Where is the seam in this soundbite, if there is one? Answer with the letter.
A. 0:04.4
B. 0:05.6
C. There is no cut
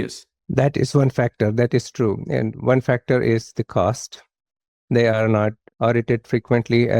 B